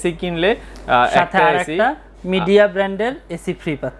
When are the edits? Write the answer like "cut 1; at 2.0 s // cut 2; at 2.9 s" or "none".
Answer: none